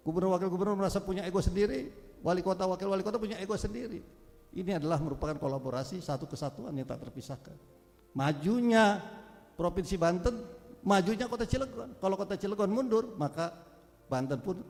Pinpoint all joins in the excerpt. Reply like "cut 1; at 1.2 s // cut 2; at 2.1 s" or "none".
none